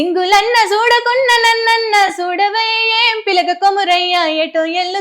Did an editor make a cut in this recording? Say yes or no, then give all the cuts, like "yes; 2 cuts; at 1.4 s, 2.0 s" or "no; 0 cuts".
no; 0 cuts